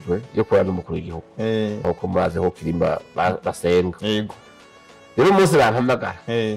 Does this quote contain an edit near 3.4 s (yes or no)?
no